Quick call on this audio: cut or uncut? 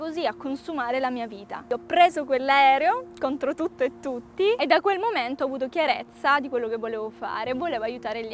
cut